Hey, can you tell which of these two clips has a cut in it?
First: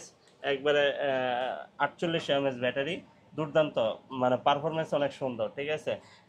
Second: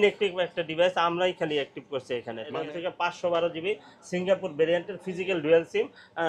second; 1 cut; at 2.5 s

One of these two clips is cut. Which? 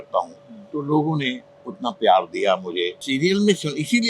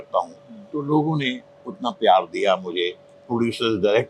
first; 1 cut; at 3.1 s

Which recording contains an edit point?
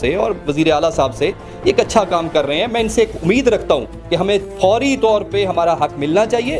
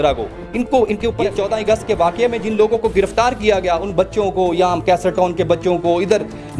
second; 1 cut; at 1.2 s

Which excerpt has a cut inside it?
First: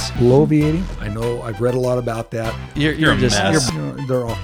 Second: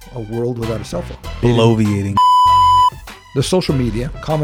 second; 3 cuts; at 1.3 s, 2.0 s, 3.1 s

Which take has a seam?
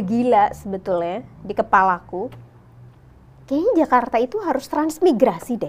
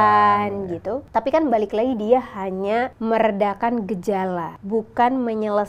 second; 3 cuts; at 1.0 s, 2.9 s, 4.5 s

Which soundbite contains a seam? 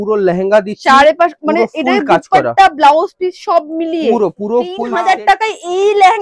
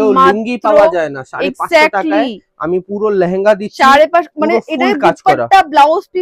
first; 1 cut; at 4.8 s

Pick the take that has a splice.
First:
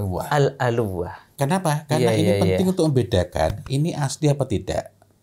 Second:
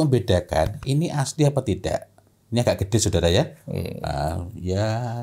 first; 1 cut; at 1.2 s

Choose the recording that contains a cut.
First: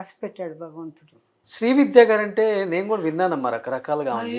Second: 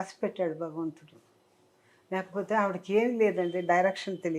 first; 1 cut; at 1.4 s

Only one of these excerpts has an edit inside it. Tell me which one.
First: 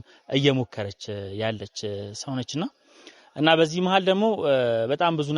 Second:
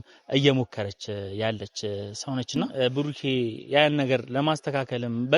second; 1 cut; at 2.7 s

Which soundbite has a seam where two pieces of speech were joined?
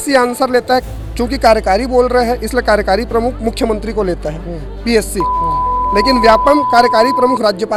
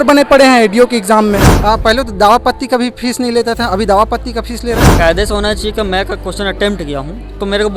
second; 2 cuts; at 1.5 s, 4.9 s

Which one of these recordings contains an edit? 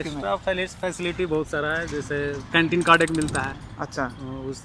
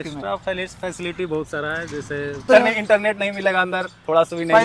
second; 1 cut; at 2.5 s

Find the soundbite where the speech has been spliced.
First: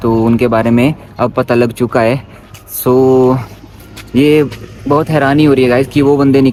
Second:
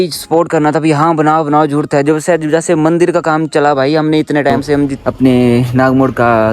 second; 1 cut; at 5.0 s

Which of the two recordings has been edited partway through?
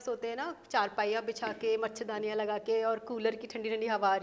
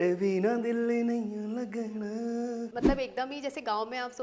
second; 1 cut; at 2.7 s

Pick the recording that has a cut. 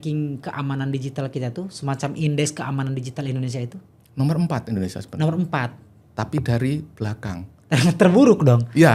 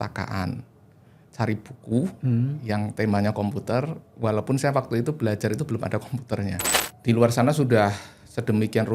second; 1 cut; at 6.7 s

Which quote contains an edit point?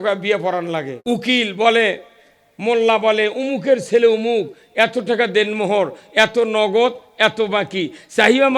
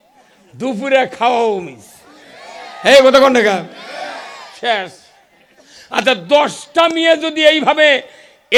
first; 1 cut; at 0.9 s

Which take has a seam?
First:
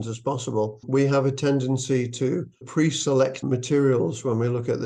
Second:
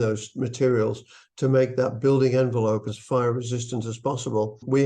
second; 1 cut; at 2.8 s

